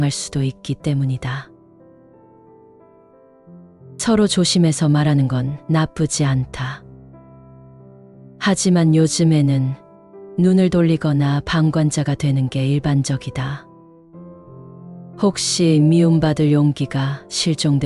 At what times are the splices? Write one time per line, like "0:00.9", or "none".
none